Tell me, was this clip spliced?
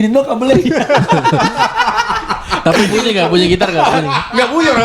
no; 0 cuts

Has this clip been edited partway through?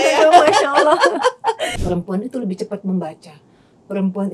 yes; 1 cut; at 1.7 s

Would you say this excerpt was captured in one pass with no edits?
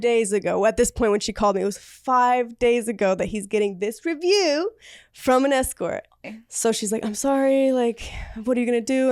no; 1 cut; at 6.2 s

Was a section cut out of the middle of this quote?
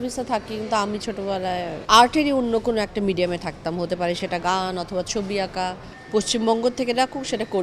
yes; 2 cuts; at 1.8 s, 5.9 s

